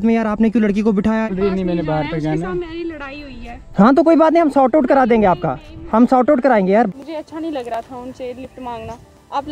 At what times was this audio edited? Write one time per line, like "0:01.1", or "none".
0:01.3
0:06.9